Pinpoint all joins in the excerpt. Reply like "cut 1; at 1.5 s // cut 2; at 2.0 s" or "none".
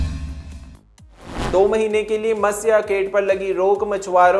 none